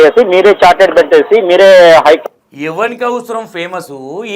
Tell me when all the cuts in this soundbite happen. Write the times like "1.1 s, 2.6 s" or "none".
none